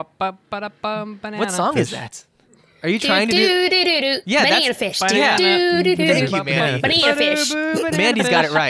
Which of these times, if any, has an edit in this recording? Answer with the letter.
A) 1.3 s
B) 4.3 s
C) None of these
A